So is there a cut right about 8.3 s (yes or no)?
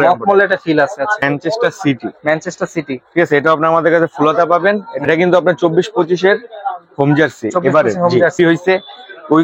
yes